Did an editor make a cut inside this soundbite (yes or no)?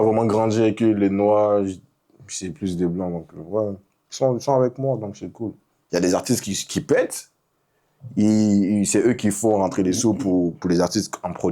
yes